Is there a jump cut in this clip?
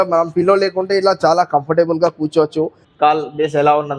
yes; 1 cut; at 2.8 s

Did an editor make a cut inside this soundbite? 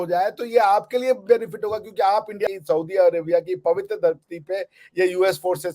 yes; 1 cut; at 2.5 s

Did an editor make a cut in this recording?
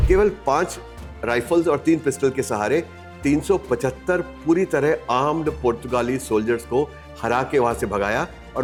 no; 0 cuts

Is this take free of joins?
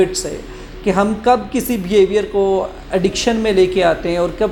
yes; 0 cuts

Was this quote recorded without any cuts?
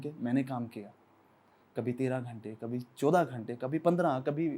yes; 0 cuts

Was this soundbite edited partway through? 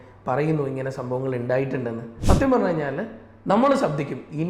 yes; 1 cut; at 2.1 s

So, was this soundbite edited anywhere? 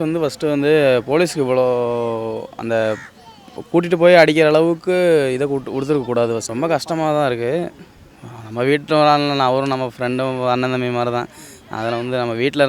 yes; 1 cut; at 6.5 s

